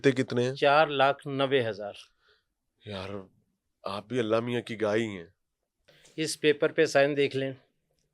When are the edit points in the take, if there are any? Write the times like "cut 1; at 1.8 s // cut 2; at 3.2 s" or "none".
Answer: cut 1; at 5.8 s